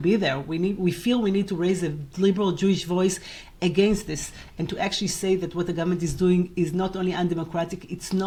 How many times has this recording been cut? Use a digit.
0